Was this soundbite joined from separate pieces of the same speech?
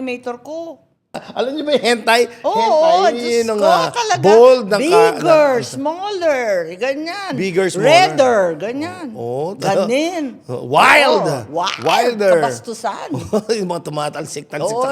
yes; 1 cut; at 1.2 s

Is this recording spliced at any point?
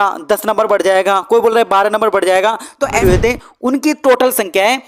yes; 1 cut; at 3.0 s

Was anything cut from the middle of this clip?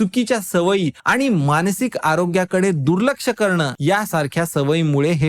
yes; 1 cut; at 3.7 s

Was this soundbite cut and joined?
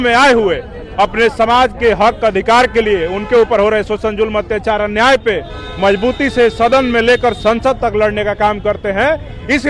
no; 0 cuts

